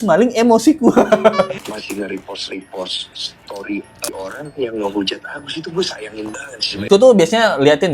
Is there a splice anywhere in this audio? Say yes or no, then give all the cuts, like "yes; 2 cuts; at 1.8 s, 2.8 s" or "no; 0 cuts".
yes; 3 cuts; at 1.7 s, 4.1 s, 6.7 s